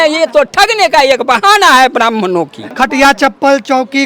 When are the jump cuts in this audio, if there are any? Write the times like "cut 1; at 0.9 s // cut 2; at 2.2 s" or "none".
cut 1; at 2.6 s